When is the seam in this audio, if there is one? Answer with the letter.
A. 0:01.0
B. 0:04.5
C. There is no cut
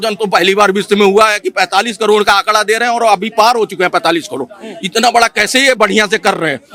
C